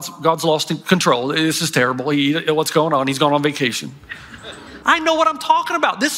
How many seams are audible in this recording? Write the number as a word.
one